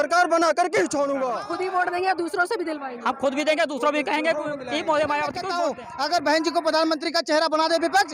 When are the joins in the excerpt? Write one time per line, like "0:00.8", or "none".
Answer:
0:01.4
0:05.4